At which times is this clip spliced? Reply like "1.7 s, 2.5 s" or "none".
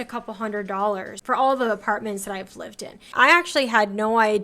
1.1 s, 3.1 s